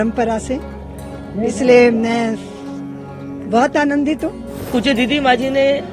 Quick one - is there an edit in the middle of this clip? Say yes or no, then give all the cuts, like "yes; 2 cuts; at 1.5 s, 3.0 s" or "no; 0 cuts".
yes; 1 cut; at 4.7 s